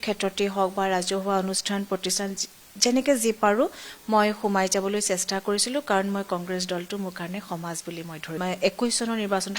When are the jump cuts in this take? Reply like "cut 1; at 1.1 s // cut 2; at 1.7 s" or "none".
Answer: cut 1; at 8.3 s